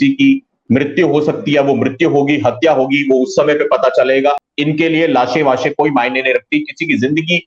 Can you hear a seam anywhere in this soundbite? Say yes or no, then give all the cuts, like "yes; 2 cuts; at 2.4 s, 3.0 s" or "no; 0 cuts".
yes; 1 cut; at 4.5 s